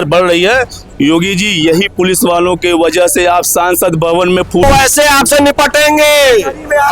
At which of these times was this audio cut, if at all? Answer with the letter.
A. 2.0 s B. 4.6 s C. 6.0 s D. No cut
B